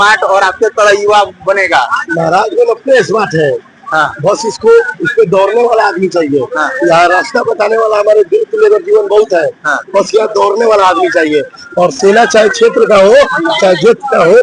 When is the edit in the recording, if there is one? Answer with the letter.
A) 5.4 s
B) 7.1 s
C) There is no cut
C